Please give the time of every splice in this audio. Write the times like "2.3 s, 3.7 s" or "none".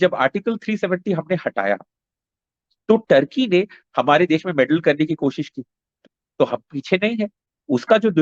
5.9 s